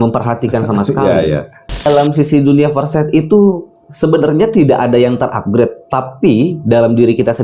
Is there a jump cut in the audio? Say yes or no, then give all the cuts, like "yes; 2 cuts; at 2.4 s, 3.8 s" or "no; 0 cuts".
yes; 1 cut; at 1.9 s